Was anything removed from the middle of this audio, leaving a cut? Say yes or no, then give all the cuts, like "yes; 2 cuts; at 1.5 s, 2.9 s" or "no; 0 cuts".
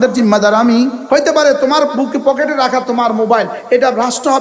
yes; 1 cut; at 1.0 s